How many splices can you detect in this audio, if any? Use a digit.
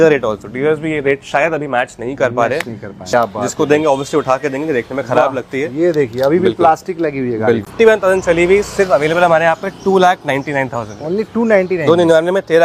2